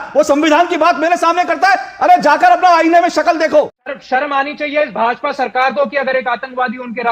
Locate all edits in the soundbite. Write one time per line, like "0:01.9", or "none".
0:03.8